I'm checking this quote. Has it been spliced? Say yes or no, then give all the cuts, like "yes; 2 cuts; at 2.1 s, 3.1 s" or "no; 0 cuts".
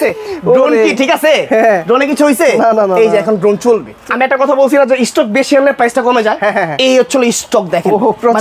yes; 1 cut; at 3.9 s